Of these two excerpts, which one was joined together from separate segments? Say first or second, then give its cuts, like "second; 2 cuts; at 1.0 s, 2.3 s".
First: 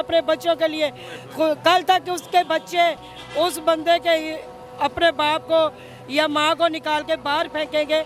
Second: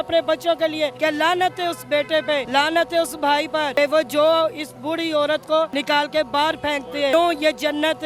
second; 5 cuts; at 0.9 s, 2.5 s, 3.7 s, 5.8 s, 7.1 s